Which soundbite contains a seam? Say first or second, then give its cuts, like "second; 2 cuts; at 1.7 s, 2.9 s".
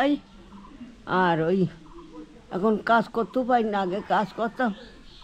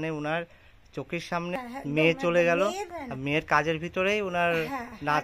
second; 2 cuts; at 1.5 s, 3.0 s